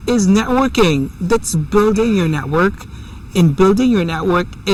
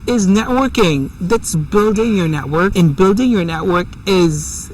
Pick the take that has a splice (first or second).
second